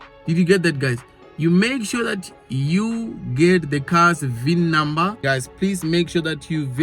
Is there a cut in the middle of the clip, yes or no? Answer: yes